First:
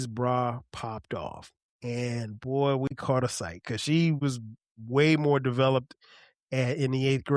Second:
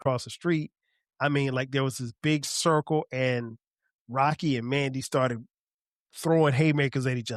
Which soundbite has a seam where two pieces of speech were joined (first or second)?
first